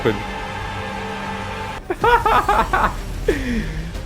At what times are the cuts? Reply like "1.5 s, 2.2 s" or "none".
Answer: 1.8 s

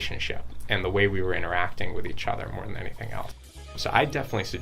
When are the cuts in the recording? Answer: 3.5 s

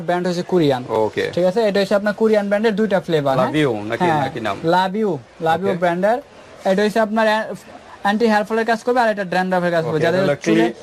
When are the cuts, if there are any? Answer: none

